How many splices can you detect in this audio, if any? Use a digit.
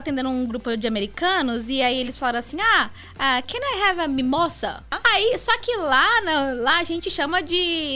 1